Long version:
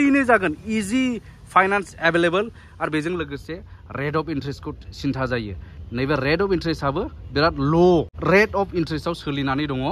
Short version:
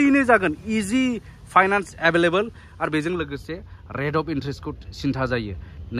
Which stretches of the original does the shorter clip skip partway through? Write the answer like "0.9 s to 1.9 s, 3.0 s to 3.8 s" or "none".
none